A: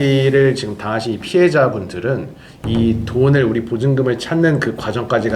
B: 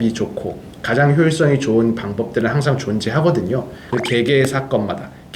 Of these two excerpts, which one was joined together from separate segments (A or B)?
B